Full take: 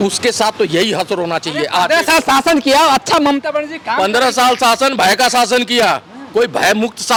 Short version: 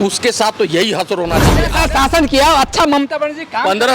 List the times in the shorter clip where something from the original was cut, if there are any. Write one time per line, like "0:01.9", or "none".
0:01.7